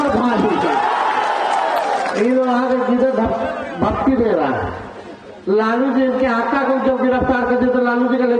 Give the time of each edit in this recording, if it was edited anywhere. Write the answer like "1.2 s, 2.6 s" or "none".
none